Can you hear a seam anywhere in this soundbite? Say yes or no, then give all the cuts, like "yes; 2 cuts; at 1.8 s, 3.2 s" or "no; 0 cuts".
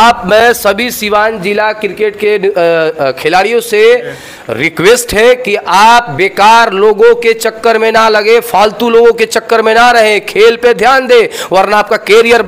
no; 0 cuts